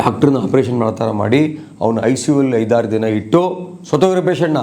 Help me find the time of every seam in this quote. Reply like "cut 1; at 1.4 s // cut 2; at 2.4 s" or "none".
none